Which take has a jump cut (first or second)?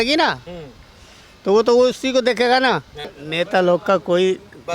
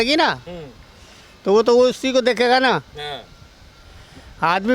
first